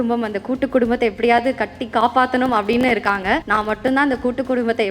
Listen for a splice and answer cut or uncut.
cut